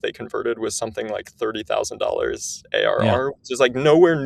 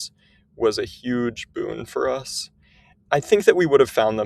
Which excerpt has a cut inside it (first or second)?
second